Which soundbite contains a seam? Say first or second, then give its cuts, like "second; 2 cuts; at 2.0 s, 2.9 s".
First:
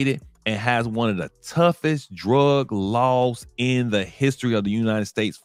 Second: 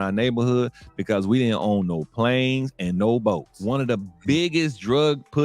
second; 1 cut; at 3.5 s